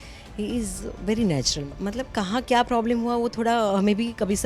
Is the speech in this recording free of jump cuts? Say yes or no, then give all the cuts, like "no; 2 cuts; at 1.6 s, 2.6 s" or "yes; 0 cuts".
no; 1 cut; at 1.6 s